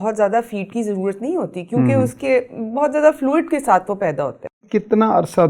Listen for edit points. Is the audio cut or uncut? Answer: cut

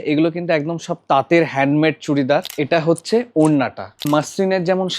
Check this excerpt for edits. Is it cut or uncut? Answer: cut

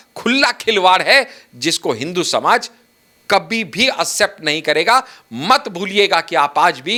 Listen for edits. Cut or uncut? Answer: uncut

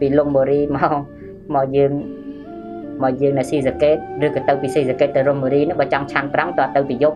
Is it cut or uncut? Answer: uncut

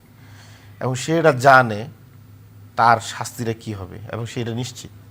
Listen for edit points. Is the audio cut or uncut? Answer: uncut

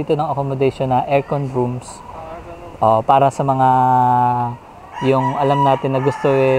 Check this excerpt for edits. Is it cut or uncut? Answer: uncut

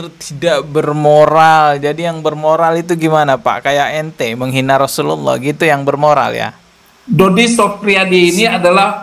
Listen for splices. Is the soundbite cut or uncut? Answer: uncut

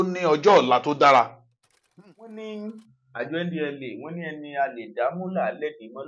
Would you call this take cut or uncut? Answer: cut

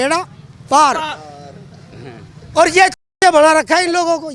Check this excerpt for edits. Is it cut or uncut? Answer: uncut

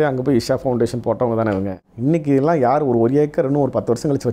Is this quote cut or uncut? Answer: cut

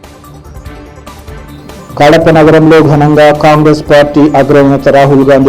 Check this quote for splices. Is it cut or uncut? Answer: cut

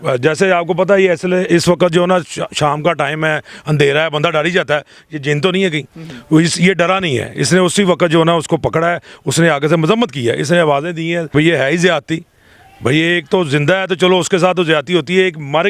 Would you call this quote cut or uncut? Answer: cut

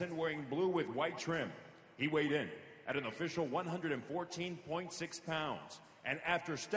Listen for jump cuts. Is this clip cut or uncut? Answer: cut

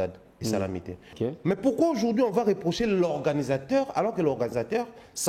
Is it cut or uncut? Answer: cut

